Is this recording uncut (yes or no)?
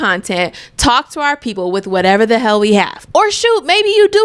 no